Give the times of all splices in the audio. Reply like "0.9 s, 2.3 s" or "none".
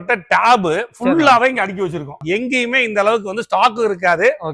2.1 s